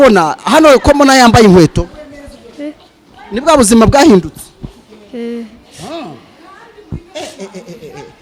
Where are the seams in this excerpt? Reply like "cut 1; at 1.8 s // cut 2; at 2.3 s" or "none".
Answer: none